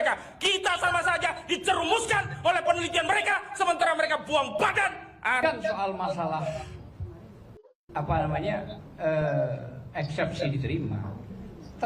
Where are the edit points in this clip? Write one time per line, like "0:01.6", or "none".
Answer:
0:05.4